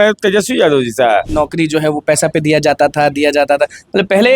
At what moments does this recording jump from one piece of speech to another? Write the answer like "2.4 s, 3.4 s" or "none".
1.3 s